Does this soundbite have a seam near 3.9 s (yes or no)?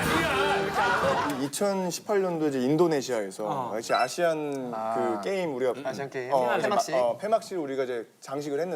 no